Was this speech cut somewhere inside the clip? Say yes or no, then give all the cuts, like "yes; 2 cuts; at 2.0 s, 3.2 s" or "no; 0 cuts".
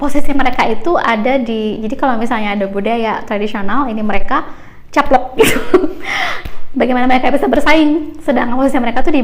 no; 0 cuts